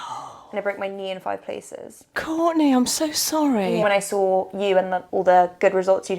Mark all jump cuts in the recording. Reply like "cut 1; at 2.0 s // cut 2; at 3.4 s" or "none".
cut 1; at 2.2 s // cut 2; at 3.8 s // cut 3; at 5.0 s